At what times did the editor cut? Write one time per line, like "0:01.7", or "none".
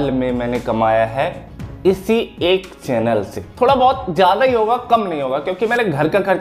0:03.4